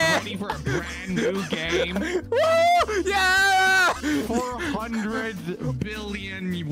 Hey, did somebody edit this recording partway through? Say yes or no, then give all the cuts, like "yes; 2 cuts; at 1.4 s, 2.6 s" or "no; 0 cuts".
yes; 1 cut; at 4.0 s